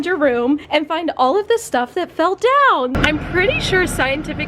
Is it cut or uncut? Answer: cut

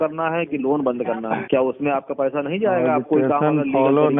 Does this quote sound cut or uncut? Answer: cut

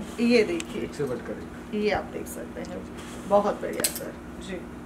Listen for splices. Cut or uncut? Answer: uncut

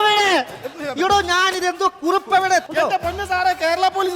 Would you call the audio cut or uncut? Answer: cut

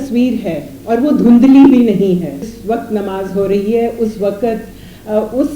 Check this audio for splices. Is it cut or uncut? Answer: cut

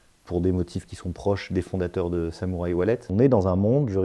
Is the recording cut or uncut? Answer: cut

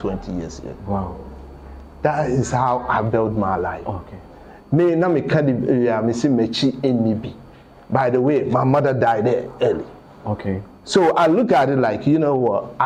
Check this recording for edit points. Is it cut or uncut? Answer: uncut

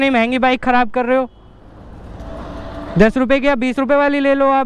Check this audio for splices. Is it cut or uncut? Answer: cut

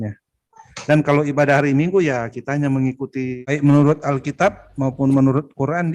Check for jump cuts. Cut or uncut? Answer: cut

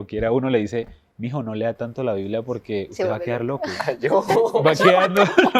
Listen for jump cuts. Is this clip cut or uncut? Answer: uncut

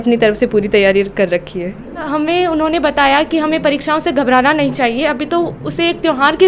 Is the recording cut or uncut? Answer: cut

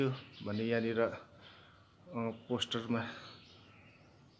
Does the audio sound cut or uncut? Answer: uncut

